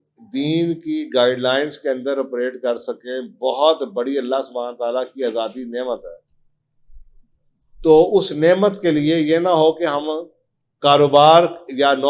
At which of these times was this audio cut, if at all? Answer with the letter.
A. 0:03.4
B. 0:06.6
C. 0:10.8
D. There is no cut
D